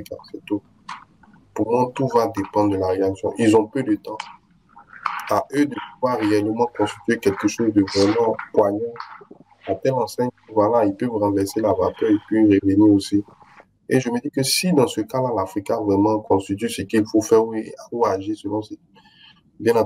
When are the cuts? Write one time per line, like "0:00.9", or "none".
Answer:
none

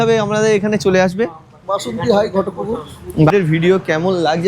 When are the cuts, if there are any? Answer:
0:03.3

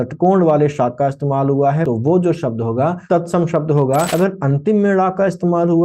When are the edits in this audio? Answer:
0:01.8
0:03.0
0:04.1

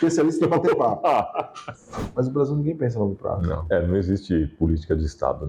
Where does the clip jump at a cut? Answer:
0:02.0
0:03.6

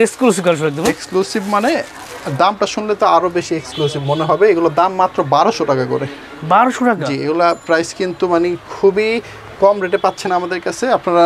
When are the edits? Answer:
none

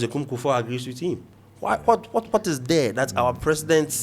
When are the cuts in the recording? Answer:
none

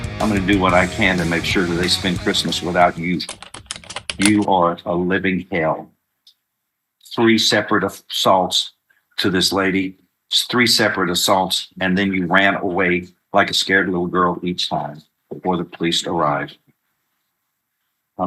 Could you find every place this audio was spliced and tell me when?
none

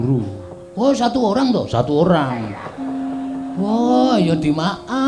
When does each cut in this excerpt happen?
none

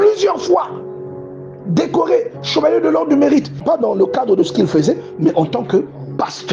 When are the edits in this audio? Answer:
0:03.5

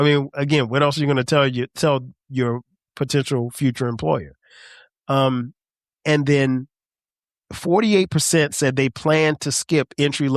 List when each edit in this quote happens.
none

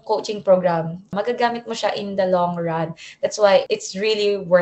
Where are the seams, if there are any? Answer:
0:01.1

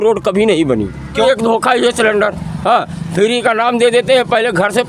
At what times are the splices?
0:01.2

